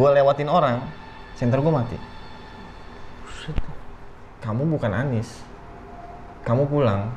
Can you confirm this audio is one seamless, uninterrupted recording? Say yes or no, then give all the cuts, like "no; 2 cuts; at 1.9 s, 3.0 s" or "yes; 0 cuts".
no; 1 cut; at 4.2 s